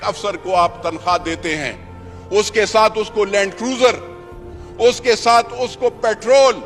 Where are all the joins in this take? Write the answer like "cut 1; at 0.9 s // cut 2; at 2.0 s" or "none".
none